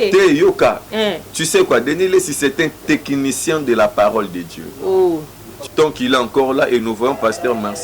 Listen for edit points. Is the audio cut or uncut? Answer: cut